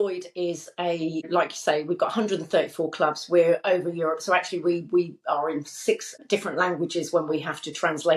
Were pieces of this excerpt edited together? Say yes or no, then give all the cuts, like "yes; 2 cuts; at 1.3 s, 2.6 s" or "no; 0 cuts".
yes; 2 cuts; at 1.3 s, 6.1 s